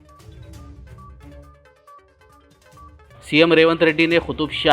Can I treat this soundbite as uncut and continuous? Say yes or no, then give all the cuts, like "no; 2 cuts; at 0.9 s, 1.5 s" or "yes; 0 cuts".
no; 1 cut; at 1.3 s